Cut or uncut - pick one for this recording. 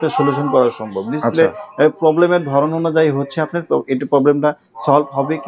uncut